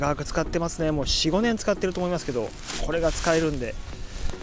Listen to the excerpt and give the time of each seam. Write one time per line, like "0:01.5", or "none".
none